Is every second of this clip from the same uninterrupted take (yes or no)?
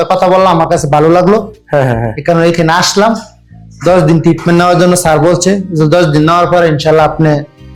yes